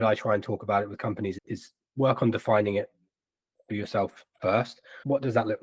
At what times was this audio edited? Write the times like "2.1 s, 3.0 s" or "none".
none